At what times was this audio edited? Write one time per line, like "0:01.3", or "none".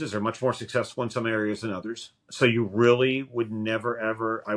none